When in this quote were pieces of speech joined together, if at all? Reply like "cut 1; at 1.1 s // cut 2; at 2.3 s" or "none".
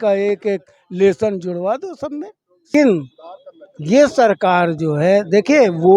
cut 1; at 2.7 s